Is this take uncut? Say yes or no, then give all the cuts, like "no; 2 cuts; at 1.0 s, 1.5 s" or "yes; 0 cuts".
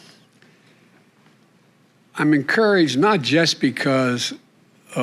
yes; 0 cuts